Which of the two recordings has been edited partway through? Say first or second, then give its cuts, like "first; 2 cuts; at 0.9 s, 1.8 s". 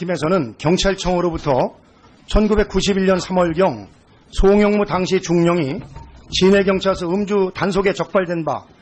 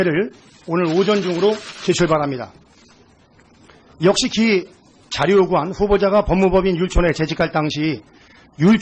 first; 1 cut; at 6.8 s